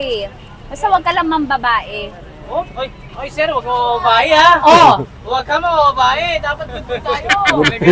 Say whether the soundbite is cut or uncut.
uncut